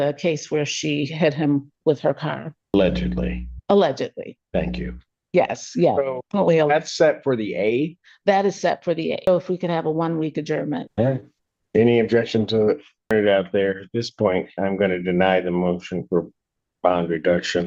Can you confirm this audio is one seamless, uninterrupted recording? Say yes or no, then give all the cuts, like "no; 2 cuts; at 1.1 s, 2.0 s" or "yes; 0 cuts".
no; 4 cuts; at 2.7 s, 9.3 s, 10.9 s, 13.1 s